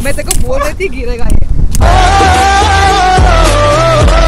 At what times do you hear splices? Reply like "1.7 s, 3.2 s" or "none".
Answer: 1.8 s

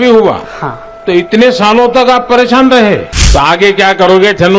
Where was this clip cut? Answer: 3.2 s

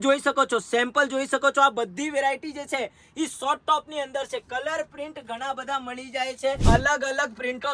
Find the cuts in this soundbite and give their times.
6.6 s

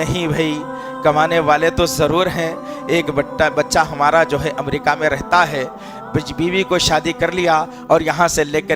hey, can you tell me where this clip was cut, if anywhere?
none

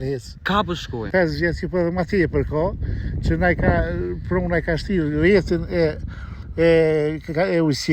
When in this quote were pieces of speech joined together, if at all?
1.1 s

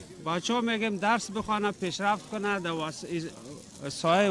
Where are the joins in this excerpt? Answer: none

